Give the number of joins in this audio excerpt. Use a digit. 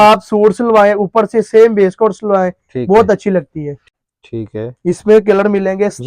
1